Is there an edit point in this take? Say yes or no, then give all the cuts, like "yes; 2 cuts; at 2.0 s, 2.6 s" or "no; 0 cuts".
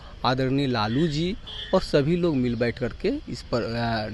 no; 0 cuts